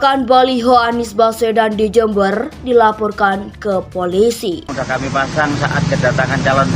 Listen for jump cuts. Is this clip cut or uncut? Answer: cut